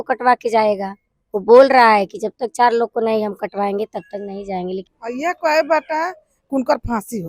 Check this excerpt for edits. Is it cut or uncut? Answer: cut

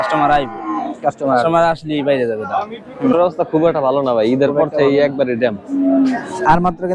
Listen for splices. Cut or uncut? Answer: cut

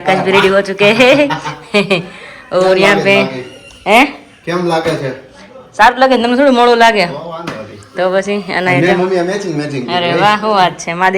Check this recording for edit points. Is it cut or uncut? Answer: uncut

